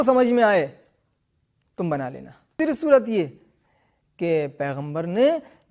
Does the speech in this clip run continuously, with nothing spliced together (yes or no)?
no